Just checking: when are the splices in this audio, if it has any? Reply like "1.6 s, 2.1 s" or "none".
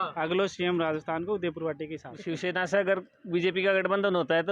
2.1 s